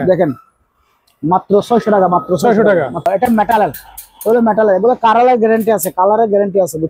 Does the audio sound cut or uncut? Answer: cut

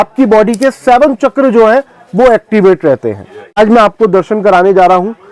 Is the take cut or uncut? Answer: uncut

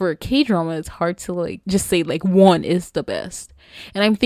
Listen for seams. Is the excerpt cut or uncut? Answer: cut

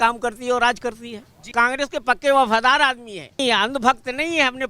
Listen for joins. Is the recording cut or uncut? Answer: cut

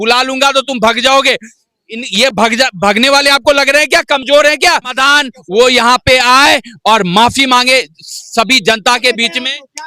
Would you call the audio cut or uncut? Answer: cut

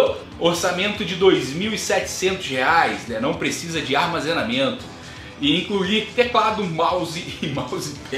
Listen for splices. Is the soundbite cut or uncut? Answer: uncut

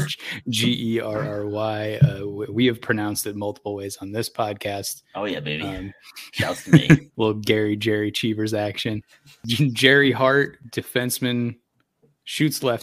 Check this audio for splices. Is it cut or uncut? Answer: cut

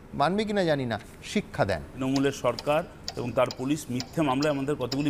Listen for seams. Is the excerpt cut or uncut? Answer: cut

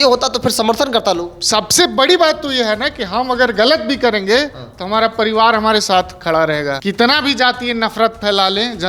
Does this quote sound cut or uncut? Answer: cut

